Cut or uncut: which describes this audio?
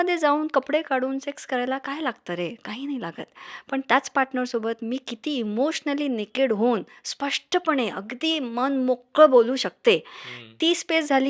uncut